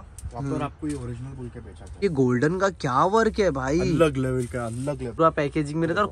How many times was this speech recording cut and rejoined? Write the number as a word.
two